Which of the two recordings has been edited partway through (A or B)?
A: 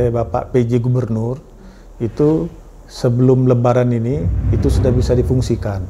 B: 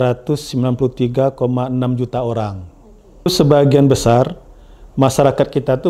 B